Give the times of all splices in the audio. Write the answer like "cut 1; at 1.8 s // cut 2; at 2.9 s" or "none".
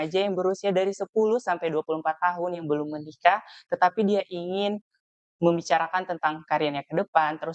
none